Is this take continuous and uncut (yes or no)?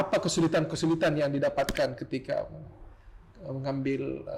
yes